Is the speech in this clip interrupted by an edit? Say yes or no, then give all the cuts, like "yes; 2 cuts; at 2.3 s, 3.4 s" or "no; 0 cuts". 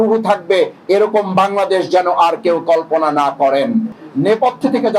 yes; 1 cut; at 3.9 s